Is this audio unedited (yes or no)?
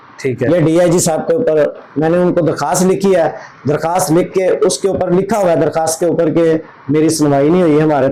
yes